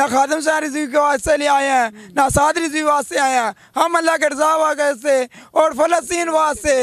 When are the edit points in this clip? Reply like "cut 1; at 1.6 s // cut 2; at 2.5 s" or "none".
none